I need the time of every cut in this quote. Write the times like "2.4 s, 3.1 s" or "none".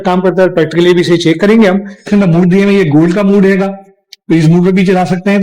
2.1 s